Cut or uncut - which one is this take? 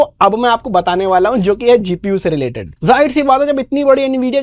cut